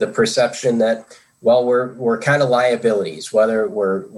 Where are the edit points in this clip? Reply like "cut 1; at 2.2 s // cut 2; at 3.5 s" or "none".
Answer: none